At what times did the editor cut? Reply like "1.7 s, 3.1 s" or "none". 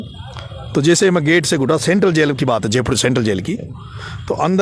none

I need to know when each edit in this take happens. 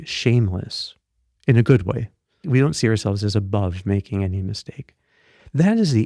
2.4 s

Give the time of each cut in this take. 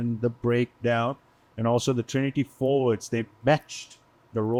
none

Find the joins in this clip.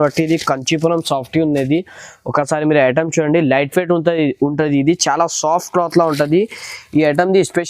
none

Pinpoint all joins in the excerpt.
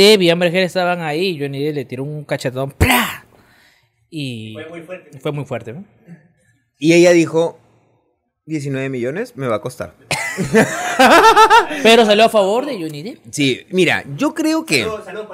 none

